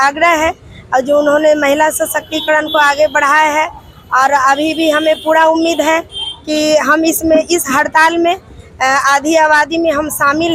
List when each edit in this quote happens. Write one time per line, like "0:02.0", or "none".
none